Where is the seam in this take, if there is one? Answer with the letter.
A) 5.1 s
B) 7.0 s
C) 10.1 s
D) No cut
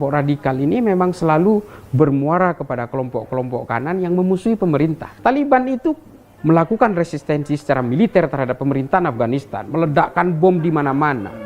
A